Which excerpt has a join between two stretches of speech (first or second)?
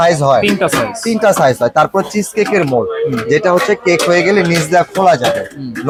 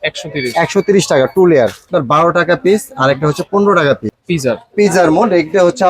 second